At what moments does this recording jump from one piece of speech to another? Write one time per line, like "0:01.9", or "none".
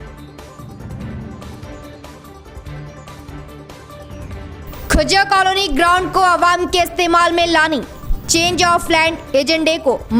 none